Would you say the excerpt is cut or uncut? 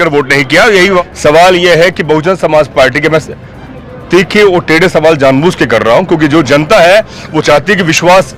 cut